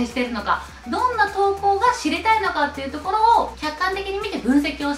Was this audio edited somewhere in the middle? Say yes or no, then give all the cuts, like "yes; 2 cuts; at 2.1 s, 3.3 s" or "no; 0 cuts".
yes; 1 cut; at 3.6 s